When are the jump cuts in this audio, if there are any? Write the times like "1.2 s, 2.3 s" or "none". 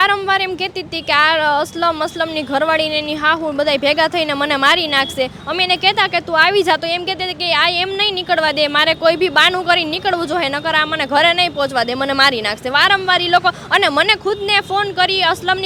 none